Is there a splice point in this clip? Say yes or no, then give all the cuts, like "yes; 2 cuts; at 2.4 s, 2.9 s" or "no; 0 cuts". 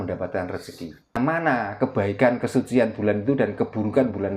yes; 1 cut; at 1.2 s